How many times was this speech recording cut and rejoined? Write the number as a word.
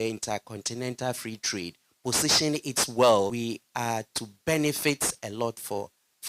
one